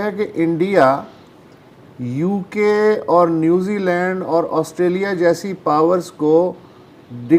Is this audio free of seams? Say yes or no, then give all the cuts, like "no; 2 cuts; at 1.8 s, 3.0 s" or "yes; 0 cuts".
yes; 0 cuts